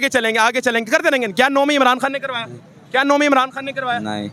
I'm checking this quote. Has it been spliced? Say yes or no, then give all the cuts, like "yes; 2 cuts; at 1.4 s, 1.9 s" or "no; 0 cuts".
no; 0 cuts